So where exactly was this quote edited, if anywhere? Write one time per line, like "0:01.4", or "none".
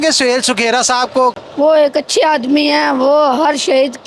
0:01.4